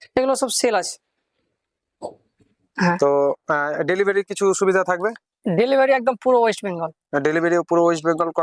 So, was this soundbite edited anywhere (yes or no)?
yes